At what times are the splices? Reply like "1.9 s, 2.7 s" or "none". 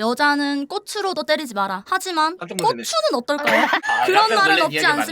3.8 s